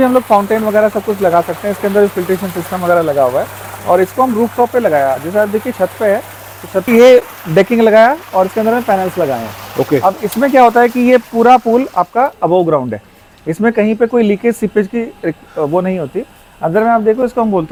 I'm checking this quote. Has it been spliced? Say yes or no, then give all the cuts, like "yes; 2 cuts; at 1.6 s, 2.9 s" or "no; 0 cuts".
no; 0 cuts